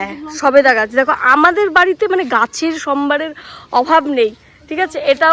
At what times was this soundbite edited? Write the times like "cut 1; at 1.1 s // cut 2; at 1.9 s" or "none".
none